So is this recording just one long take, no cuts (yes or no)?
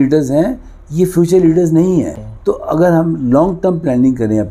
yes